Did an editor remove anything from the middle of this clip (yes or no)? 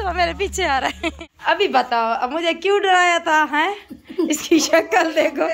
yes